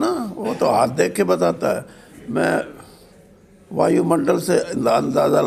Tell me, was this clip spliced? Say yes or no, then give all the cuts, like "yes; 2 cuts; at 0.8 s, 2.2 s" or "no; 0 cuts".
no; 0 cuts